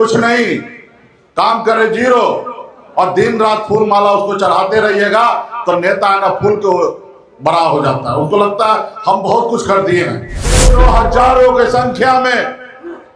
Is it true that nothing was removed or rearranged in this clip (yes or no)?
no